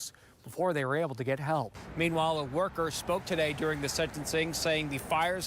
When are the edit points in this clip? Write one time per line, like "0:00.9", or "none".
0:01.8